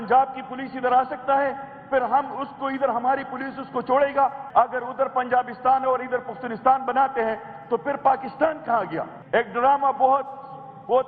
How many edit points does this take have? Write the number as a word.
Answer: two